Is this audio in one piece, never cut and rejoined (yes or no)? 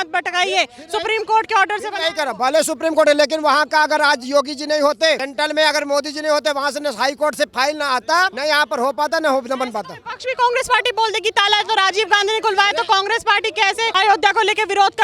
no